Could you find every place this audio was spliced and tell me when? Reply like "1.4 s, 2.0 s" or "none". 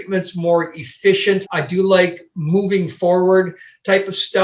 1.5 s

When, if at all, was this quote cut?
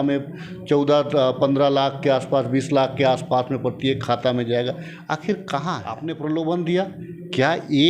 6.0 s

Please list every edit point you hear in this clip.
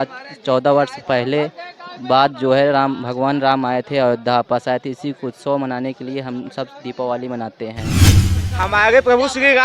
8.0 s

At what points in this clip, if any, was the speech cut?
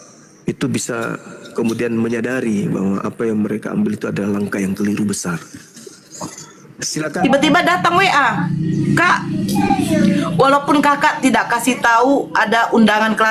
7.2 s

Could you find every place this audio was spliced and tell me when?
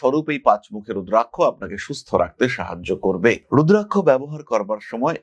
3.4 s

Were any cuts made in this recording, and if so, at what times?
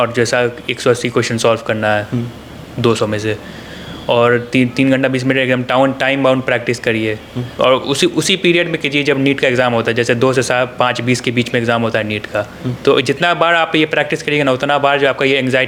none

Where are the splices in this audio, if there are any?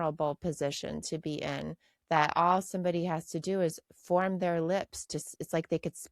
none

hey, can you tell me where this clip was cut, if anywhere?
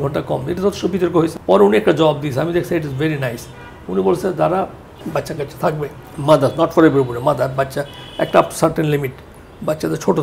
1.3 s, 6.1 s

